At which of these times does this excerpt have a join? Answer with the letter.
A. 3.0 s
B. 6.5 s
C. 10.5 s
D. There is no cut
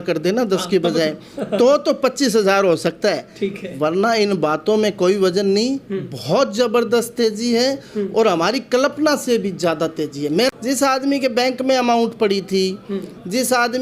C